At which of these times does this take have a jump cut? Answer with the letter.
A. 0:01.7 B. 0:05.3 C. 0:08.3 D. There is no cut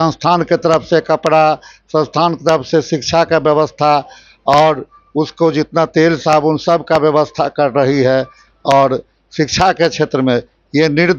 D